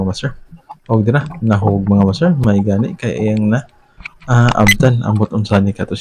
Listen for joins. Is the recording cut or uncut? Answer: uncut